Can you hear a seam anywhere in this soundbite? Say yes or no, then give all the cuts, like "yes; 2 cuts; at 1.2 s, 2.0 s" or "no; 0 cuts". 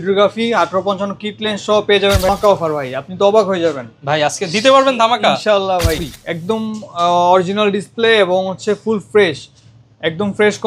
yes; 2 cuts; at 2.3 s, 6.1 s